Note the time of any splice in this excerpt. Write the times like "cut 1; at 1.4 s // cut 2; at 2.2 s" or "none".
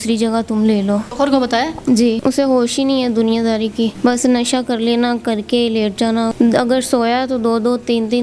cut 1; at 1.1 s // cut 2; at 2.2 s // cut 3; at 3.9 s // cut 4; at 6.3 s